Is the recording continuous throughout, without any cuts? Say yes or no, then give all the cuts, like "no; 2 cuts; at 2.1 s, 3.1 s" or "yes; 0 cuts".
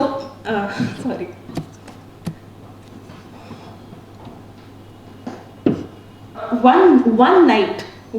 no; 1 cut; at 6.4 s